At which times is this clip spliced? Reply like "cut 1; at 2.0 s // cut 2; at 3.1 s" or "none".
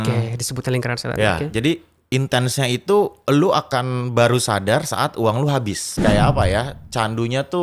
cut 1; at 6.0 s